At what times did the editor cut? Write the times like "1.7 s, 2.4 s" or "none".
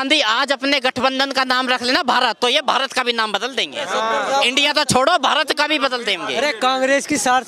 none